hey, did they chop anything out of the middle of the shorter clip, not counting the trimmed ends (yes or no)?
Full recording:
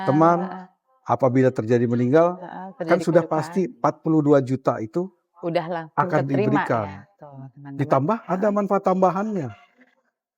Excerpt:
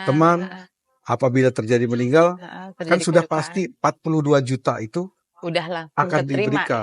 no